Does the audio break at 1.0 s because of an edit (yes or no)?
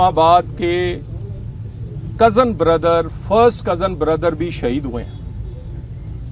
no